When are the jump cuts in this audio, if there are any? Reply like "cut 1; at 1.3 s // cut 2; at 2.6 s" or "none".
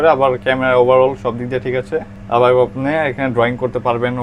none